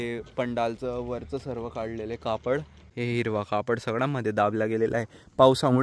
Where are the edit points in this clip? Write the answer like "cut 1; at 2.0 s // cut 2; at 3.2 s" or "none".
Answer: cut 1; at 2.8 s